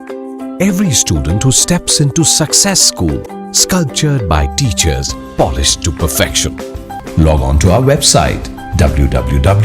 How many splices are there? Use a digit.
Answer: 1